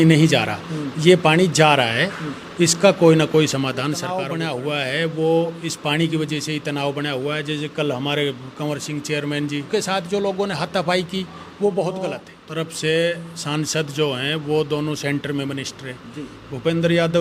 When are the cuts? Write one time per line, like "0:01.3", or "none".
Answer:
0:04.2
0:09.7
0:12.3